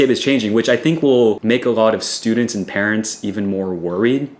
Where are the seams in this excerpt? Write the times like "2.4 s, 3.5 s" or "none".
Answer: none